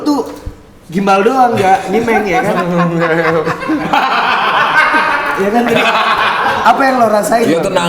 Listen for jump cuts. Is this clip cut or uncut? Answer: uncut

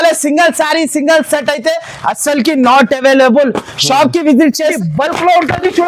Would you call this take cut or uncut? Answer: cut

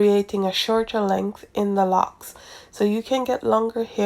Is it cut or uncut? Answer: uncut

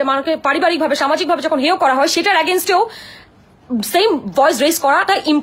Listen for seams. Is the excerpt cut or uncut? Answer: uncut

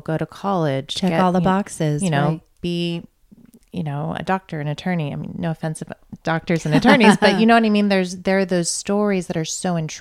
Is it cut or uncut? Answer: uncut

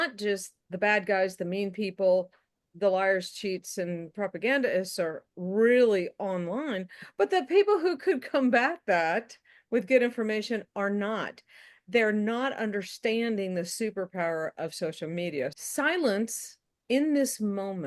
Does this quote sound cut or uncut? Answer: cut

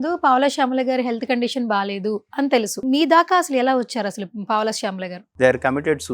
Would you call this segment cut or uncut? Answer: cut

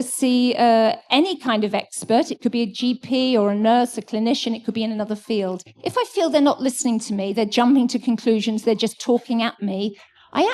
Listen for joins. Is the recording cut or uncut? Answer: cut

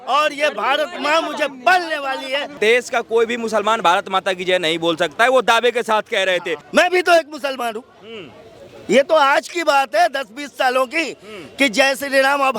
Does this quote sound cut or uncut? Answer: cut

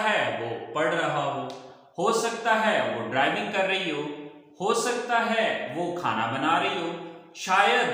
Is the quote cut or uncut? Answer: uncut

